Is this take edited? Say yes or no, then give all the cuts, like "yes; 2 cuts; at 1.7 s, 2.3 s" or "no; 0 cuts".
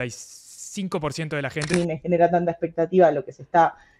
yes; 1 cut; at 1.7 s